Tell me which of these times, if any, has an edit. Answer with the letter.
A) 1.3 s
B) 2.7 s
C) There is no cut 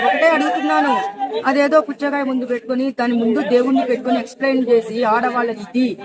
A